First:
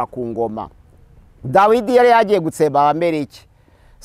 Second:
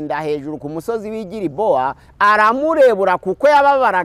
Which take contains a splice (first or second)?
second